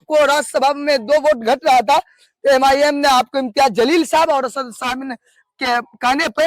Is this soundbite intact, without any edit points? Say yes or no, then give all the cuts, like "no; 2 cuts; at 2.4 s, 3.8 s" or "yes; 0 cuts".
yes; 0 cuts